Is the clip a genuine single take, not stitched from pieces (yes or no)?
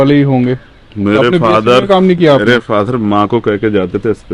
yes